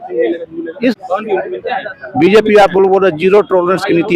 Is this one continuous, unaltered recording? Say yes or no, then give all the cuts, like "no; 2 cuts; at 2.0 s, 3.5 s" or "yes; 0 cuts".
no; 1 cut; at 0.9 s